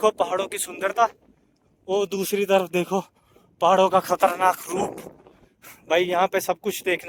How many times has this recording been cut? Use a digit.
0